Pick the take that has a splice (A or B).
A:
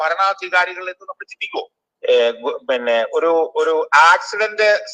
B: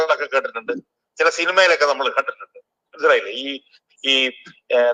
A